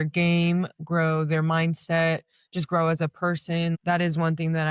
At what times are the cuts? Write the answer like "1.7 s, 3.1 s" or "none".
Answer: 3.8 s